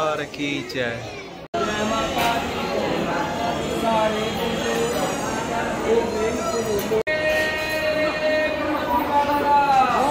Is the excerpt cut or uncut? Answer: uncut